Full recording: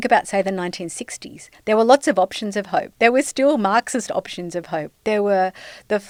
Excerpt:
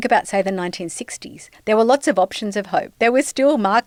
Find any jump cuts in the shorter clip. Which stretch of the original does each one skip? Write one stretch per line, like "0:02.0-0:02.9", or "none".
none

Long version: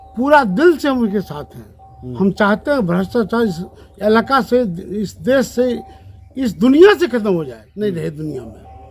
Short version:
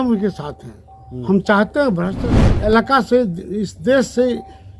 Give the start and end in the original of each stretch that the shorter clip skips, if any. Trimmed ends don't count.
0:03.1-0:03.6

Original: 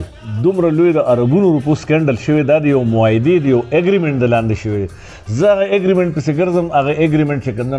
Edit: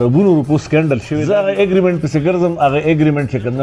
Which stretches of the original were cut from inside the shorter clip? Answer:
0:02.3-0:05.3

